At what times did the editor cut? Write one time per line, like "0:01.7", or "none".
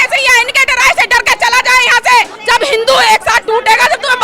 0:02.4